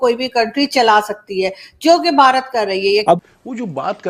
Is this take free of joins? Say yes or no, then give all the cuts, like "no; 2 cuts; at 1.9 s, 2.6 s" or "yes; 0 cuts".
no; 1 cut; at 3.1 s